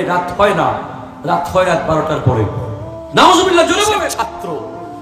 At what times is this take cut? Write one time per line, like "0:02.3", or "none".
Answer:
0:04.1